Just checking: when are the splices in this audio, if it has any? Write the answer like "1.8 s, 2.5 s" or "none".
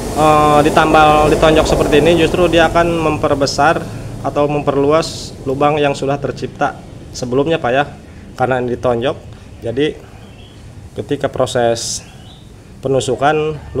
none